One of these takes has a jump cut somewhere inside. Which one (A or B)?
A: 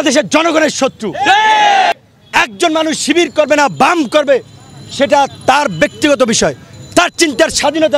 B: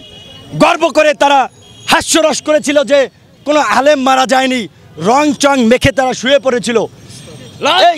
A